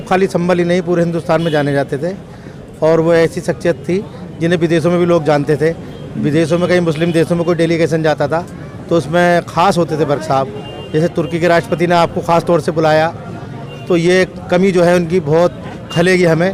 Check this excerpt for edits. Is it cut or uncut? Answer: uncut